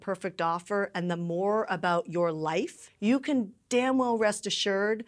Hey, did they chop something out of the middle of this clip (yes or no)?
yes